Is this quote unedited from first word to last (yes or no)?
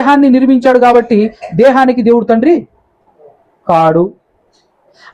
yes